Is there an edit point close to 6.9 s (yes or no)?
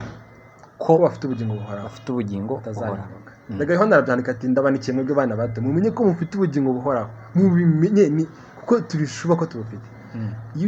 no